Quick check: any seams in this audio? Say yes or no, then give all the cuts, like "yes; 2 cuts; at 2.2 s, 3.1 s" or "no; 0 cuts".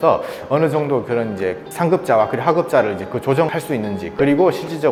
no; 0 cuts